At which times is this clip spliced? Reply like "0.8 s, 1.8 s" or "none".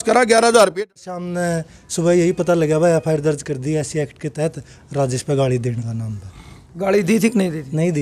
1.1 s